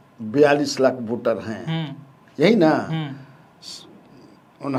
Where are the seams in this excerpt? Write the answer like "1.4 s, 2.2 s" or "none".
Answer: none